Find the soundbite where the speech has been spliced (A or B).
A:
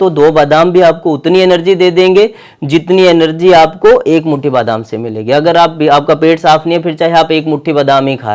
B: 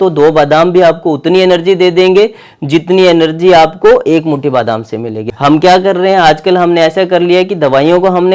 B